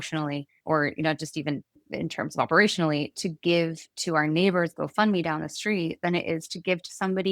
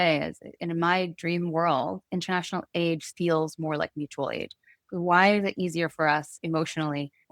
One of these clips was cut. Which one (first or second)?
first